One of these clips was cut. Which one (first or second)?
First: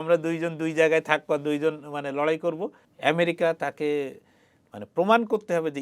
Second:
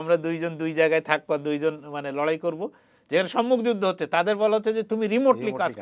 first